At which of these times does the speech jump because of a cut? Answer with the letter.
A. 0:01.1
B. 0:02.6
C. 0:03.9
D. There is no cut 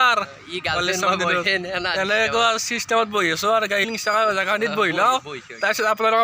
C